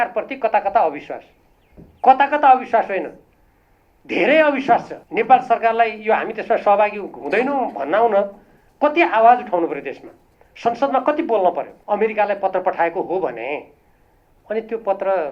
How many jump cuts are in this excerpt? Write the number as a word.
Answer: two